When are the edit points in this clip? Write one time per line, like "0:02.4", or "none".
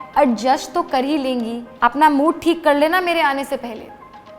0:01.6